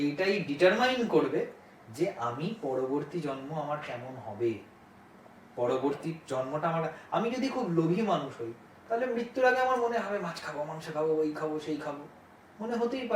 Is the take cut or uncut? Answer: uncut